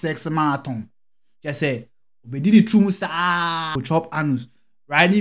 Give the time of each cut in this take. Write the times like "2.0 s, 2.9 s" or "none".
3.8 s